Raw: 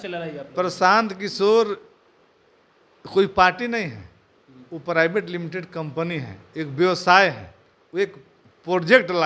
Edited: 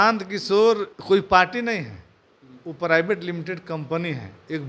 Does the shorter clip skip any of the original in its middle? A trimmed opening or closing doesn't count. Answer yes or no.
yes